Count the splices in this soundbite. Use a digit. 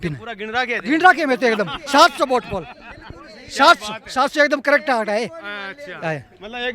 0